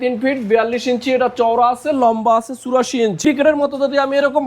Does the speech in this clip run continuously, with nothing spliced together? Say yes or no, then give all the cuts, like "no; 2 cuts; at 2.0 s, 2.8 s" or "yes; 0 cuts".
no; 1 cut; at 3.2 s